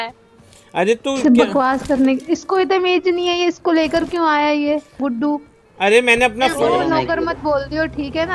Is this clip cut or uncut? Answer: cut